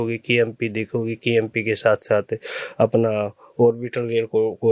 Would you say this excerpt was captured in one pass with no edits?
yes; 0 cuts

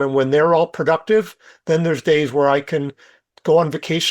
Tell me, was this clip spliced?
no; 0 cuts

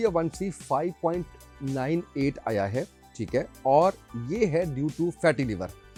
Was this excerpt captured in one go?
yes; 0 cuts

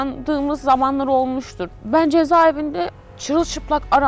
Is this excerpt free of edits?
yes; 0 cuts

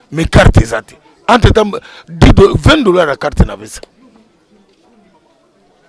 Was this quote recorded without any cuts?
yes; 0 cuts

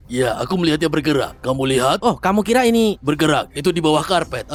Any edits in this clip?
no; 0 cuts

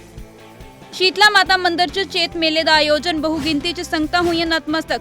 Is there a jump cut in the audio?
yes; 1 cut; at 0.9 s

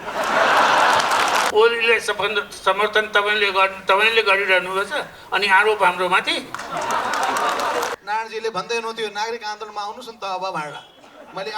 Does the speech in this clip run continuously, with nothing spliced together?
no; 2 cuts; at 1.5 s, 7.9 s

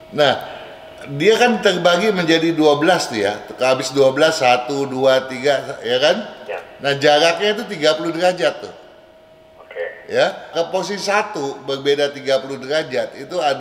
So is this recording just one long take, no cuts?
no; 1 cut; at 10.5 s

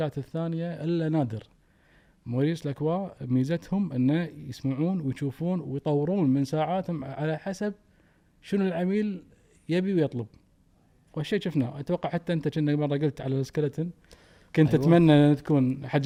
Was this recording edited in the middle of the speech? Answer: no; 0 cuts

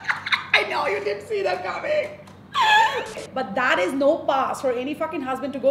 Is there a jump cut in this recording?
yes; 1 cut; at 3.3 s

